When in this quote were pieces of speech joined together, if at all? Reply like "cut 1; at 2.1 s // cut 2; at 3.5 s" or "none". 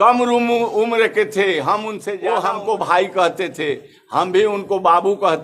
cut 1; at 2.1 s